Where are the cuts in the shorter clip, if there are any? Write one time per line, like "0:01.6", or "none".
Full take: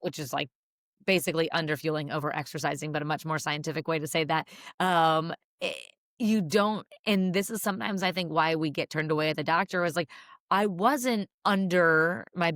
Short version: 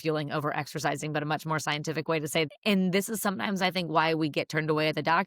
0:02.5